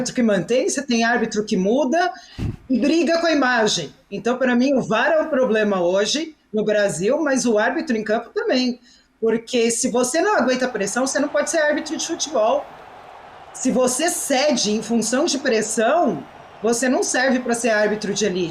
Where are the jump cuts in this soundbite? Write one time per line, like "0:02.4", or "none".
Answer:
none